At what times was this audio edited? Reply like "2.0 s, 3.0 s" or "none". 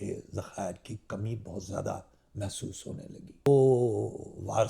3.5 s